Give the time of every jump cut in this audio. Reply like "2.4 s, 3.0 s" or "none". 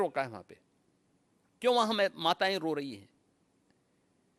none